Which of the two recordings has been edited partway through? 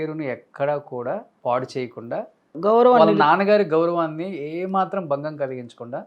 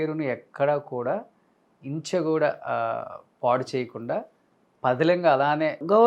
first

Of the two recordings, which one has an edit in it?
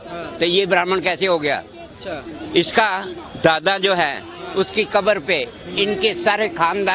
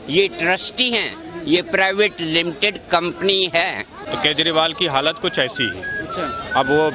second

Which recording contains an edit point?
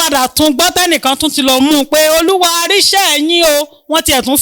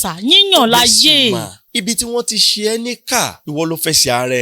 second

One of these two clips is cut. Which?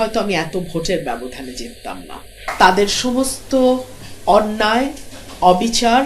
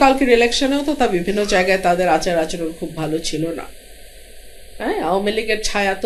first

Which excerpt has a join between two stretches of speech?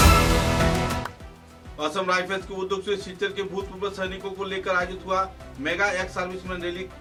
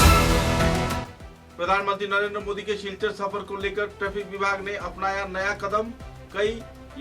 second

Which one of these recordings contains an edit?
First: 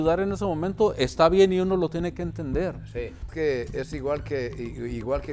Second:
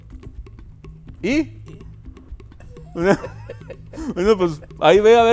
first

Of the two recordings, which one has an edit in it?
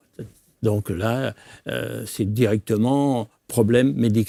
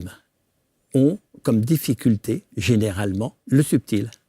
second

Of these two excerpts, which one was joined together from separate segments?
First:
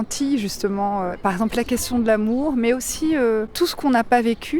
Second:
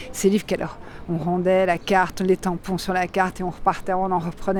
first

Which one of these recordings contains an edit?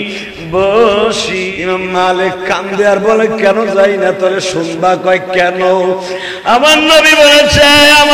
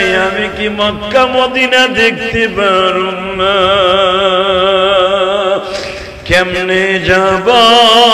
first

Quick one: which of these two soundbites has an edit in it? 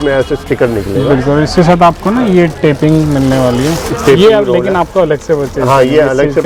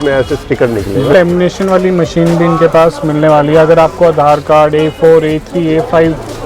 second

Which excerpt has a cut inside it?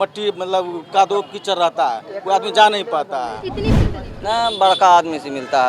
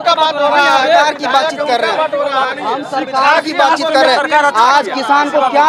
first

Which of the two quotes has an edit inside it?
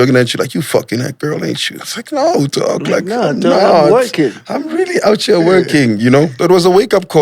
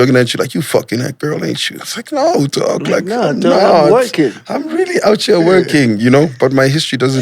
first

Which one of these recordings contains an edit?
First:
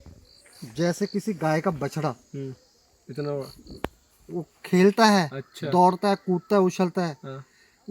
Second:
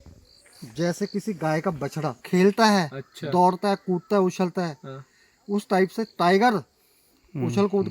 second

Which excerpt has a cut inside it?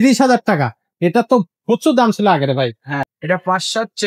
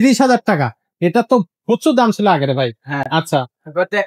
first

